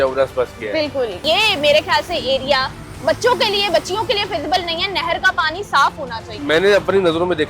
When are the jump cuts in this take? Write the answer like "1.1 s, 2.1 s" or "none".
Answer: 1.2 s, 6.3 s